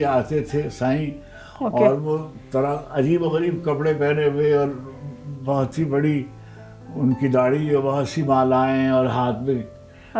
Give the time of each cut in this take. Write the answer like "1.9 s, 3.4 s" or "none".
none